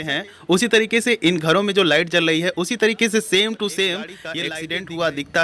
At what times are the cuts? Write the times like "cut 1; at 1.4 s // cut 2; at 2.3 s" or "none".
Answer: cut 1; at 4.3 s